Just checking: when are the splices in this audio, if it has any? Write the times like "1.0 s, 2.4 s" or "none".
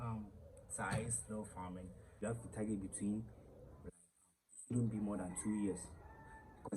2.2 s